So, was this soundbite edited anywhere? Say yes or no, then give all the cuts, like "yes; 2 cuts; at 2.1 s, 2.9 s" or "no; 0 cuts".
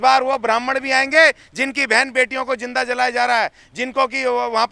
no; 0 cuts